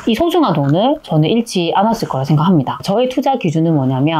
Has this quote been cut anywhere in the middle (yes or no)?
yes